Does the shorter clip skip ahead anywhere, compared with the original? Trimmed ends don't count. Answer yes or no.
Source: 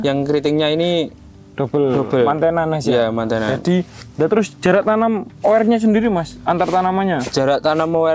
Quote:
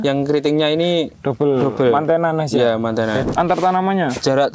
yes